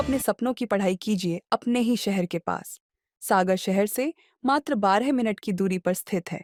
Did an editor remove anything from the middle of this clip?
no; 0 cuts

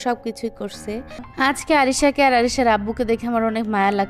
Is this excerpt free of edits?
no; 1 cut; at 1.3 s

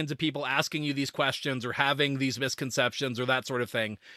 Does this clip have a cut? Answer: no; 0 cuts

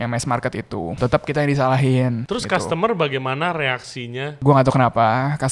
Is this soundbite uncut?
no; 3 cuts; at 0.9 s, 2.2 s, 4.3 s

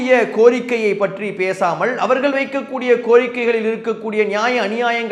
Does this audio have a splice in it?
no; 0 cuts

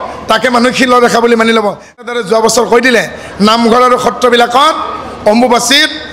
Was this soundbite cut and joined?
yes; 1 cut; at 2.1 s

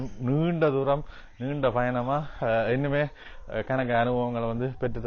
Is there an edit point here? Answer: no; 0 cuts

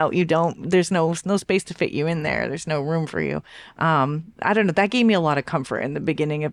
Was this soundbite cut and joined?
no; 0 cuts

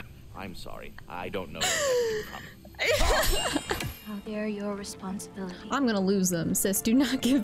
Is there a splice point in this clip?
yes; 1 cut; at 3.9 s

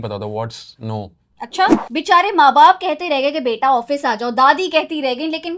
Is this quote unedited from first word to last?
no; 1 cut; at 1.8 s

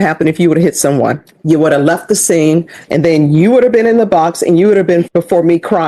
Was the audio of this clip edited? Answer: yes; 3 cuts; at 1.3 s, 2.8 s, 5.1 s

